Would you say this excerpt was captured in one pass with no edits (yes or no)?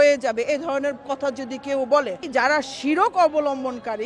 no